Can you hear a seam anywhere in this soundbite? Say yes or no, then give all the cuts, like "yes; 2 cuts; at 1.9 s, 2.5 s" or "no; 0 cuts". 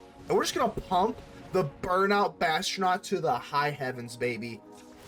no; 0 cuts